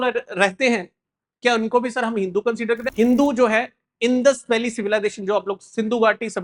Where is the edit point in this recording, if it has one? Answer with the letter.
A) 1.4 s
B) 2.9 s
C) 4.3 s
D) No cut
B